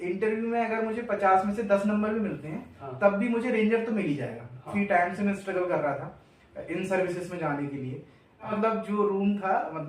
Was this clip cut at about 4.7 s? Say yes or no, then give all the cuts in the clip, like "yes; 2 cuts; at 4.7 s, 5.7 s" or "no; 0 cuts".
yes; 2 cuts; at 4.7 s, 8.5 s